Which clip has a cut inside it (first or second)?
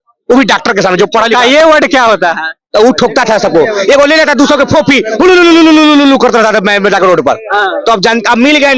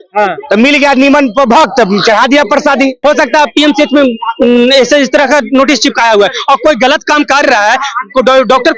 second